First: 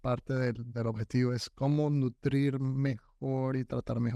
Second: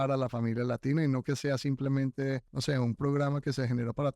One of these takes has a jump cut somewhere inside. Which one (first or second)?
second